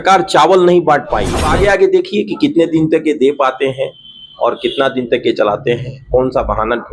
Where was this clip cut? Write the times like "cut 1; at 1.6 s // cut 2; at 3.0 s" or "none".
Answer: cut 1; at 1.4 s